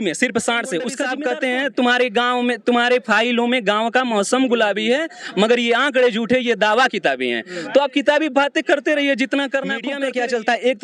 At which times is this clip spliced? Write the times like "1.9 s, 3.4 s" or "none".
1.2 s, 10.0 s